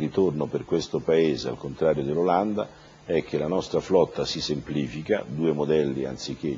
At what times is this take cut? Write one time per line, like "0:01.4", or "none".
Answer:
0:03.3